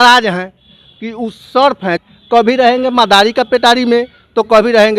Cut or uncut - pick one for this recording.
cut